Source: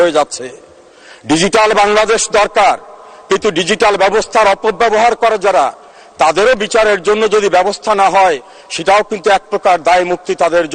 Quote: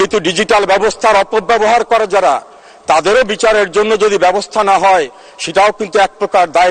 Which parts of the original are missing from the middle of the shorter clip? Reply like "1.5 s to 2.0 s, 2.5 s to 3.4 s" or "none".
none

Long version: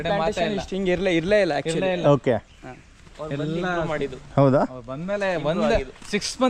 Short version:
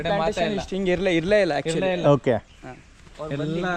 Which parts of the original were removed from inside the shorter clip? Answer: none

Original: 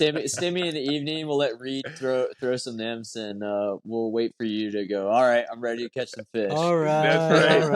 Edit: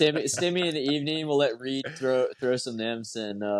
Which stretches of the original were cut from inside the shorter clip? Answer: none

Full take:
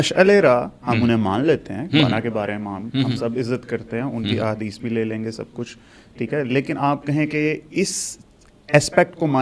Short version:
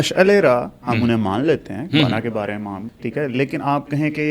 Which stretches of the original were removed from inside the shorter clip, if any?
2.8 s to 6.0 s

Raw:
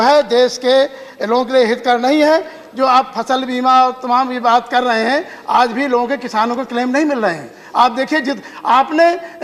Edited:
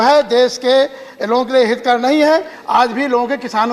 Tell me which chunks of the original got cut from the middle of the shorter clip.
2.6 s to 5.4 s

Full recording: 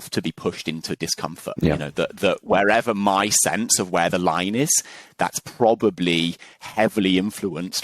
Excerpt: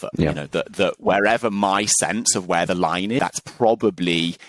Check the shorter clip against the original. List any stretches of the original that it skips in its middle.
4.6 s to 5.2 s

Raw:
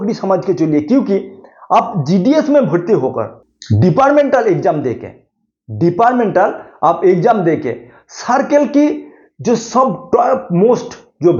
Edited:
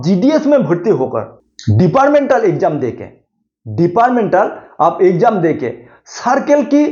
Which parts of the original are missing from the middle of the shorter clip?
none

